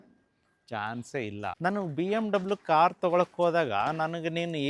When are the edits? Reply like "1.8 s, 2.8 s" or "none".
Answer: 1.6 s